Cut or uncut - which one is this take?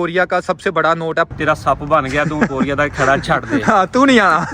cut